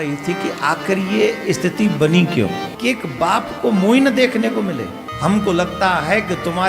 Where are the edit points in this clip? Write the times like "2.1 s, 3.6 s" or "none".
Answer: 2.8 s, 5.0 s